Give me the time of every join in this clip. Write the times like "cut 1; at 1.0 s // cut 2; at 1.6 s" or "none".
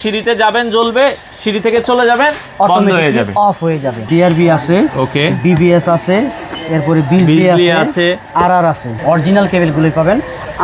cut 1; at 4.0 s // cut 2; at 9.0 s